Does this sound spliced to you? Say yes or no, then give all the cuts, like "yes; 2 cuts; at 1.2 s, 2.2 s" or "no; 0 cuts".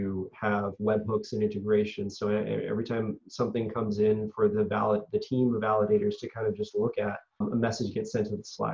yes; 1 cut; at 7.4 s